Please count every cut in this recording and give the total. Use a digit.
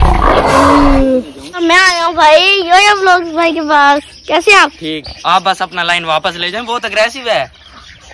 1